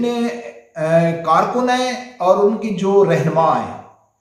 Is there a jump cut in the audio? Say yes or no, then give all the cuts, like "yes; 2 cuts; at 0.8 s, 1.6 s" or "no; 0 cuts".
no; 0 cuts